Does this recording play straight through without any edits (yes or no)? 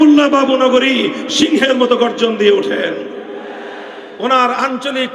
no